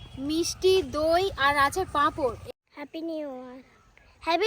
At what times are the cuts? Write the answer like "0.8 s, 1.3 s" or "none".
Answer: 2.4 s